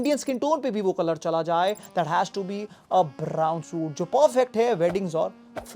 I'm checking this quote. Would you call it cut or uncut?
uncut